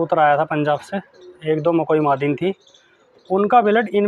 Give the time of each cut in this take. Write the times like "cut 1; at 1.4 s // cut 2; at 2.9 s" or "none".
none